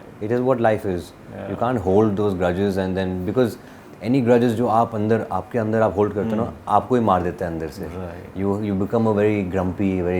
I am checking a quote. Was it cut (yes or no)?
no